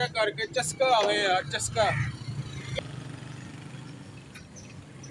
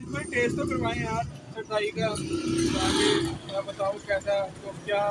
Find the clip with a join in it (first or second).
first